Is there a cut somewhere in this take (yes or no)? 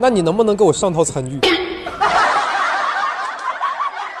no